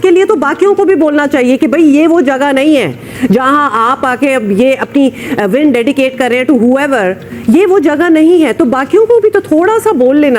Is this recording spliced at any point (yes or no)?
no